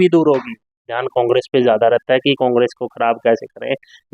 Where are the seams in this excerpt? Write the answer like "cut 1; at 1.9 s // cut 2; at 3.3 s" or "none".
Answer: cut 1; at 0.9 s